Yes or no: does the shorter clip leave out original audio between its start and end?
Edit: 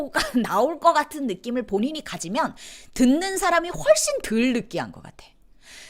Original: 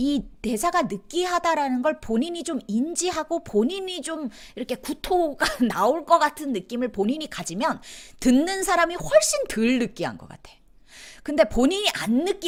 no